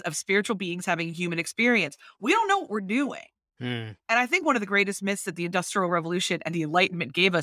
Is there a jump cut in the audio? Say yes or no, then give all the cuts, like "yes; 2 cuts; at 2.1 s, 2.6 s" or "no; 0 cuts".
no; 0 cuts